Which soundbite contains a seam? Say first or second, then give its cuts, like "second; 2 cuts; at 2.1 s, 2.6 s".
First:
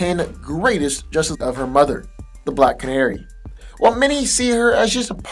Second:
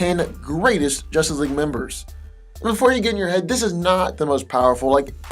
second; 1 cut; at 1.3 s